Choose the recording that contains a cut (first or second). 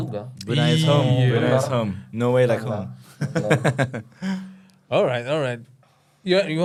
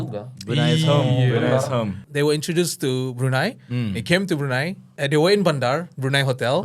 second